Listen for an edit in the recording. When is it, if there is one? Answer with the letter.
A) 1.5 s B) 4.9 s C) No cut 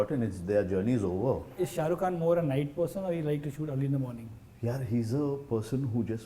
A